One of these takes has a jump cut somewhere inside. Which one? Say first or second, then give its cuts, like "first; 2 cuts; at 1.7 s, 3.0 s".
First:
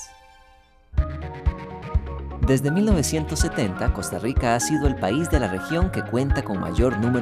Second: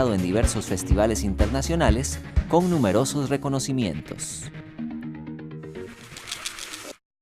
second; 1 cut; at 5.8 s